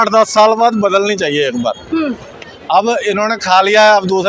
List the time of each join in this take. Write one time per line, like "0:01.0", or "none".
none